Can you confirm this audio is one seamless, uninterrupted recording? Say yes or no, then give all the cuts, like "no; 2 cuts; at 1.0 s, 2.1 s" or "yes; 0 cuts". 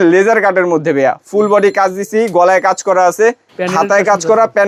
yes; 0 cuts